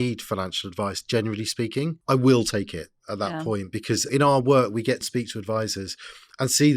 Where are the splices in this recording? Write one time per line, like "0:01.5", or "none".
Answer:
0:02.0
0:04.1
0:05.1